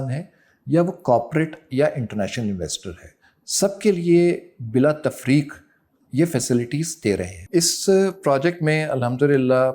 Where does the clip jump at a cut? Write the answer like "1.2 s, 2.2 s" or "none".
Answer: 7.3 s